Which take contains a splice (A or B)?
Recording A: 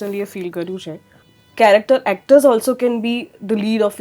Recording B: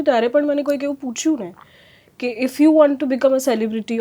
A